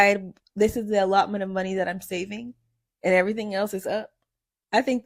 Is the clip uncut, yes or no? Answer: yes